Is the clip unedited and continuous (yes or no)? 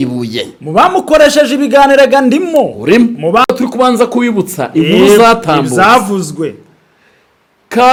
yes